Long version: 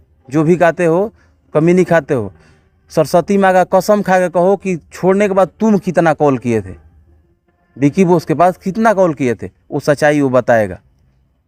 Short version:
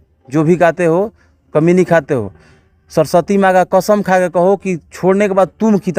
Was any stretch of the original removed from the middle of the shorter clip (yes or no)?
no